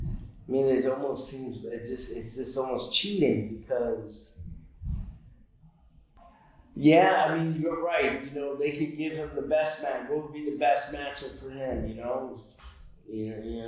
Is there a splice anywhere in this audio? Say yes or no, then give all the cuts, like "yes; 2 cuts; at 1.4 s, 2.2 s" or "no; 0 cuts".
yes; 1 cut; at 6.1 s